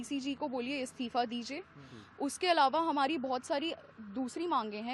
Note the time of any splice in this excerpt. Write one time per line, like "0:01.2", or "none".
none